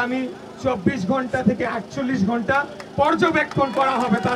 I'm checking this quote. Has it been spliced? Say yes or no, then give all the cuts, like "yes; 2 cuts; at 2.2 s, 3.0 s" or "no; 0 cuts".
no; 0 cuts